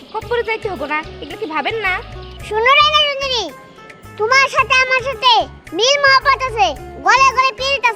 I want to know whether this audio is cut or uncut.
uncut